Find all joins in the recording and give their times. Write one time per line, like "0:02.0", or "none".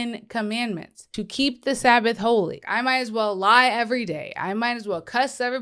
0:01.0
0:02.6